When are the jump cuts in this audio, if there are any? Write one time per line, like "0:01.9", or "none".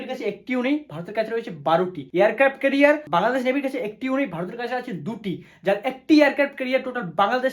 0:02.0
0:03.0